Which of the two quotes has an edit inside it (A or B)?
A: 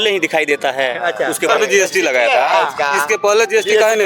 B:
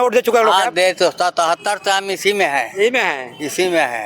A